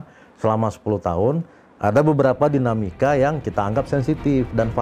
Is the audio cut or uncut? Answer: uncut